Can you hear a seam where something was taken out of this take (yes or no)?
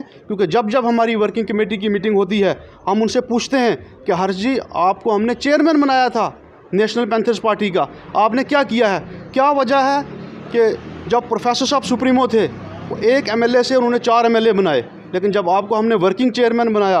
no